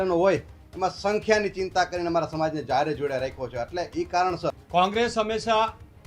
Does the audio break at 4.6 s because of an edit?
yes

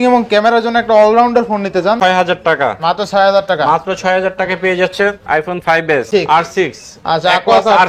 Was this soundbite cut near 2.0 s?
yes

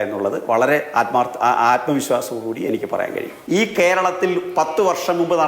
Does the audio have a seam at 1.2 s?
no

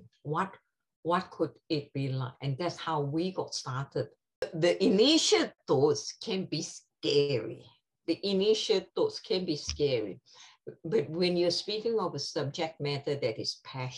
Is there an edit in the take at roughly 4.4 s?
yes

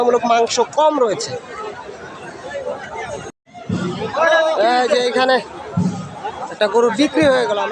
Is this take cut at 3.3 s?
yes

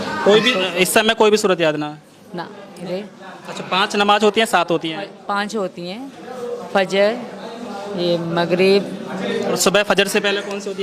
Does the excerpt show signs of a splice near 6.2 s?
no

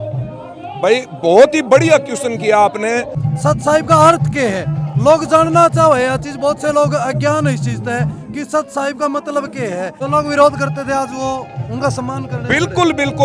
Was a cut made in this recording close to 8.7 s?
no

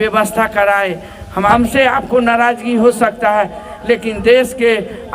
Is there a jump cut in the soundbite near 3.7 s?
no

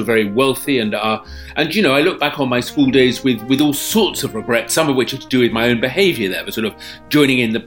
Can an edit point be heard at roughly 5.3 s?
no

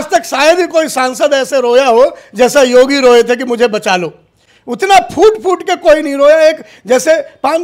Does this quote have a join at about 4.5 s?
no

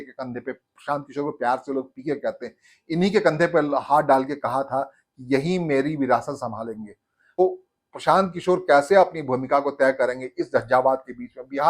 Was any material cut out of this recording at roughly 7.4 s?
yes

